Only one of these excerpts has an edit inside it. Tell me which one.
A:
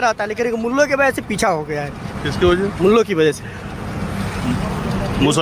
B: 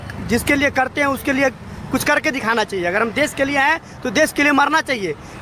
A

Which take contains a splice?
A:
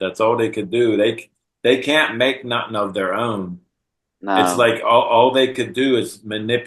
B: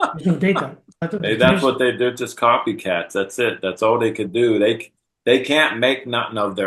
B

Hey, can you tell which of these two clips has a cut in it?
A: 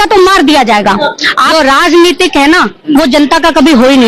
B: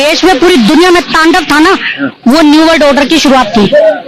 A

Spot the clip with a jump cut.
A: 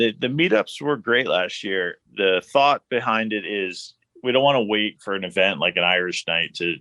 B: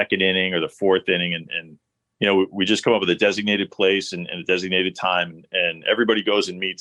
A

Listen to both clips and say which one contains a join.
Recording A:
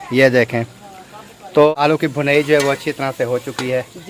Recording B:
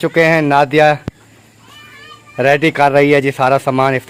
A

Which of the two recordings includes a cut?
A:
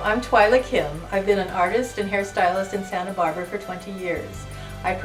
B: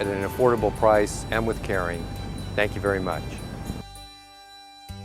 B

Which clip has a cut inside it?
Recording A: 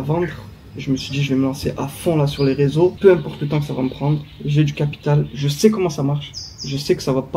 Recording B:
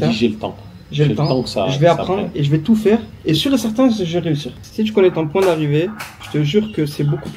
B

